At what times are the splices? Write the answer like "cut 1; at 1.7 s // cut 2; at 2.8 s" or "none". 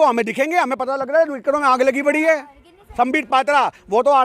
cut 1; at 2.8 s